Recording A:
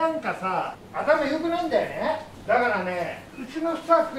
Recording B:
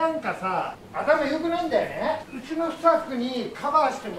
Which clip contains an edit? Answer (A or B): B